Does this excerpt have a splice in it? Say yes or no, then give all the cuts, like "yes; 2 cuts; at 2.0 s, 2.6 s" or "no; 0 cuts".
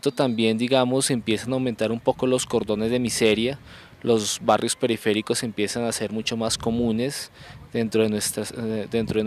yes; 1 cut; at 2.2 s